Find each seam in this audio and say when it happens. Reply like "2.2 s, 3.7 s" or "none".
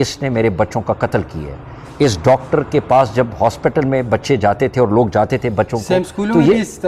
none